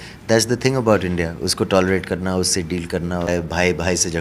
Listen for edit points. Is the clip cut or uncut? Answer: cut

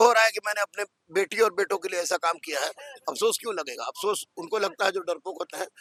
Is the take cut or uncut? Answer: uncut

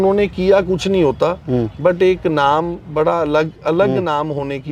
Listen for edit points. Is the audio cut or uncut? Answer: uncut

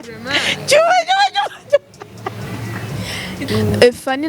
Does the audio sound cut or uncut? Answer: cut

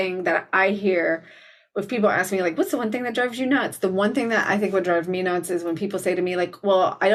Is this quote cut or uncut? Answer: uncut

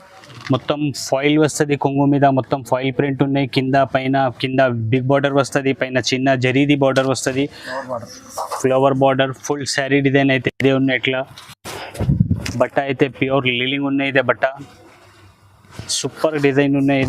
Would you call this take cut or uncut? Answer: uncut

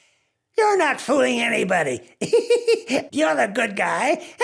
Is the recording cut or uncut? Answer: cut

